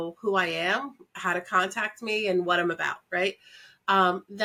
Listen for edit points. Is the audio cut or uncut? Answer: uncut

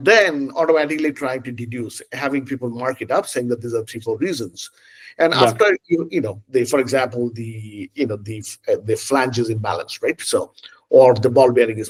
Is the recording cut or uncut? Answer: uncut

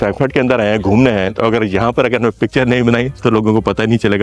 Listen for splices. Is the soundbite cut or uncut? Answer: uncut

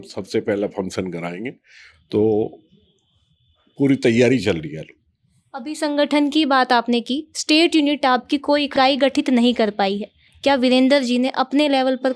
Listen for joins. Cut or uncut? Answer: uncut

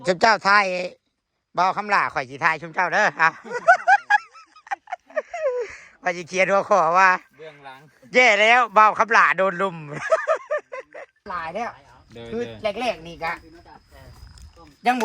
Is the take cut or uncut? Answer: cut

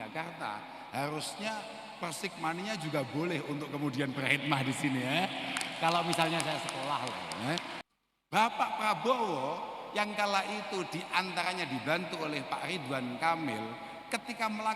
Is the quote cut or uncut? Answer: cut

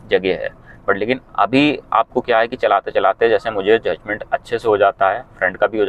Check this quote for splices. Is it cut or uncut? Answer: uncut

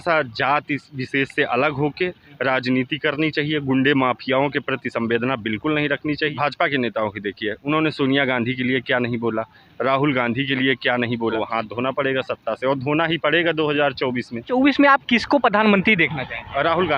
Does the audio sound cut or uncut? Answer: cut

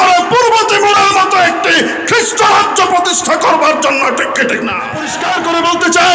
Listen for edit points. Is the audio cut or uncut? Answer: cut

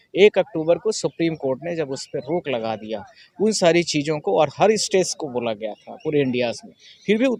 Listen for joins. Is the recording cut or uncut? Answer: uncut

